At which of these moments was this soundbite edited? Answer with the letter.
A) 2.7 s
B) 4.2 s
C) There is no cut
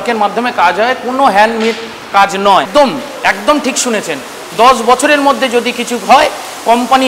A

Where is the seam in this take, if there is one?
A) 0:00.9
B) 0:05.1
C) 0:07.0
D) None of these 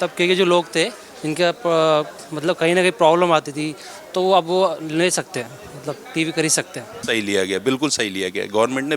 C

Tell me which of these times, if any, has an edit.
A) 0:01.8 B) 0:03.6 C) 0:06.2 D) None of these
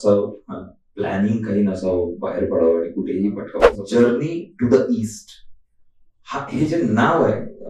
B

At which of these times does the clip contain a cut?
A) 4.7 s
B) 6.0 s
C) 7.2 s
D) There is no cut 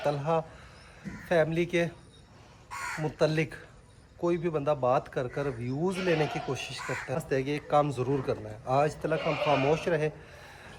C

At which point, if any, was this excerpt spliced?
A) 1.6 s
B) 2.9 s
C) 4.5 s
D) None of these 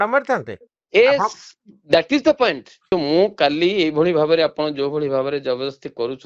B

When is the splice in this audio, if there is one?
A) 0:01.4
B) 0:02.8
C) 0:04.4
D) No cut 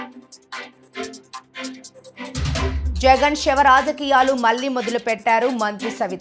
B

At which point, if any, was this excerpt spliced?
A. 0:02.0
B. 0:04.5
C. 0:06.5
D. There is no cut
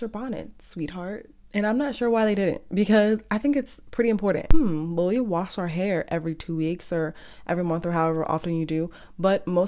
B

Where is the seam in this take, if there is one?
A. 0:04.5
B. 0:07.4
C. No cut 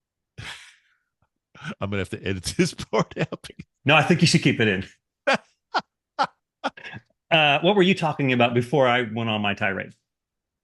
C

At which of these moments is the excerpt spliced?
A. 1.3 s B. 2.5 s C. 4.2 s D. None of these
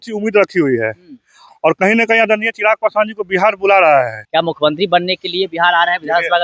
C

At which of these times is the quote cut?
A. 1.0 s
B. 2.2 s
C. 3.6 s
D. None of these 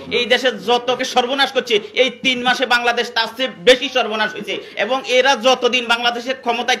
A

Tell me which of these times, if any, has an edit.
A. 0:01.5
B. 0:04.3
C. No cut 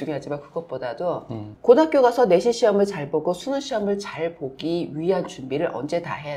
A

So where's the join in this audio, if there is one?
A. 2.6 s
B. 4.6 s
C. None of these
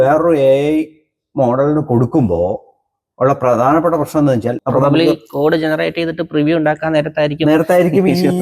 B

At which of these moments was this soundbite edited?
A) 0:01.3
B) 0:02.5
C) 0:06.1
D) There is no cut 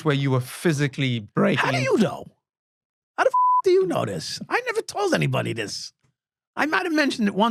D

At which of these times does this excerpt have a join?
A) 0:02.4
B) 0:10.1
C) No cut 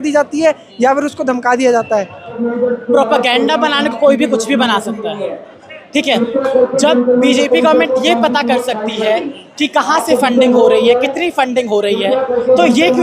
A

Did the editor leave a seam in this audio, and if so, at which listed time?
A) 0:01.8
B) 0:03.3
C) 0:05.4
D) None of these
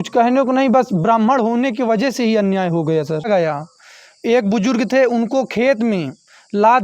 B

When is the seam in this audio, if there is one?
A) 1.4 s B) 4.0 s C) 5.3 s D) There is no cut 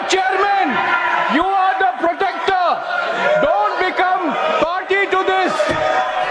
D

